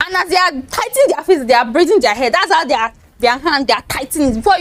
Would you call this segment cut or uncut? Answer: uncut